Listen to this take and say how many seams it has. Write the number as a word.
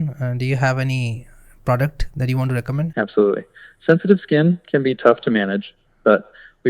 one